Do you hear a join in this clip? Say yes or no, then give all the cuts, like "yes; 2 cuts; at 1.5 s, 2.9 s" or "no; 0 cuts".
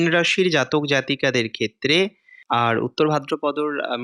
yes; 1 cut; at 2.3 s